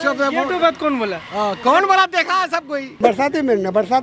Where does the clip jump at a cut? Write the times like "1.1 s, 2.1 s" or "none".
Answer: 2.9 s